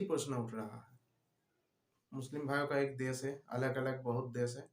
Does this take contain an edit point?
yes; 1 cut; at 1.9 s

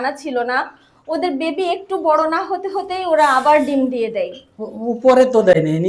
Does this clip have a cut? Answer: no; 0 cuts

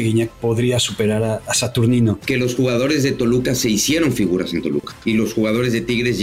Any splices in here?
yes; 2 cuts; at 2.2 s, 4.9 s

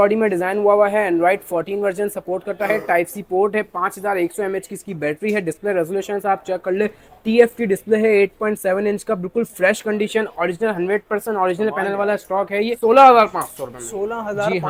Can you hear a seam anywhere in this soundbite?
no; 0 cuts

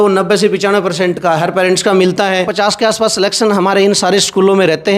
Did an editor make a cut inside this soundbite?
yes; 1 cut; at 2.5 s

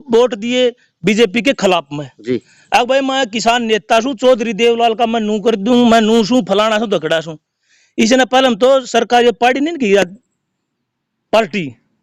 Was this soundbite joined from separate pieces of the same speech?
no; 0 cuts

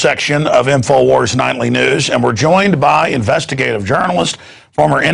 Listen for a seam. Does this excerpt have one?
yes; 1 cut; at 3.8 s

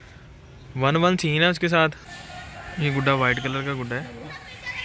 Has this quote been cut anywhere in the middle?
yes; 1 cut; at 2.1 s

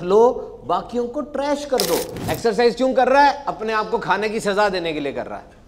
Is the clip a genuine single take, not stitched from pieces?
no; 1 cut; at 2.2 s

